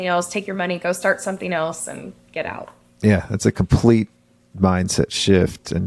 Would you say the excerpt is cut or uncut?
uncut